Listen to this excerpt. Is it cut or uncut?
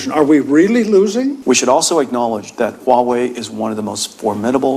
cut